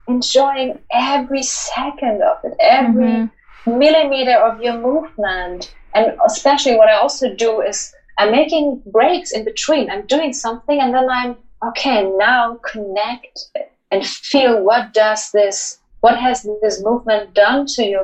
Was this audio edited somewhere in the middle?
no; 0 cuts

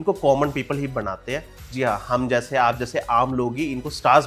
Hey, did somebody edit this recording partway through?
no; 0 cuts

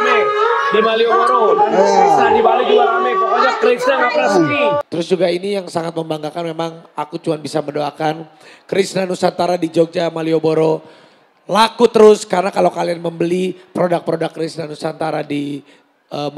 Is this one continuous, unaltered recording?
no; 1 cut; at 4.9 s

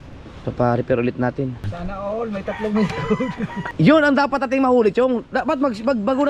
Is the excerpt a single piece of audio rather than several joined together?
no; 2 cuts; at 1.8 s, 3.6 s

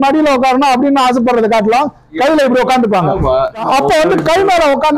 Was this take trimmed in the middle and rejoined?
yes; 1 cut; at 3.6 s

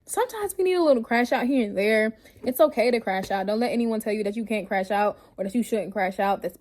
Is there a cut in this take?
no; 0 cuts

